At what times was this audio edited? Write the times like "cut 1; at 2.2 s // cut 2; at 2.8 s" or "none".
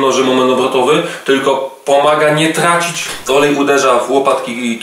cut 1; at 3.1 s